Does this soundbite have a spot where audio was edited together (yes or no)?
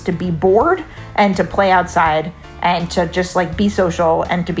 no